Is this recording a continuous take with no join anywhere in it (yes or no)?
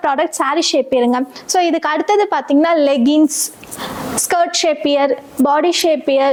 yes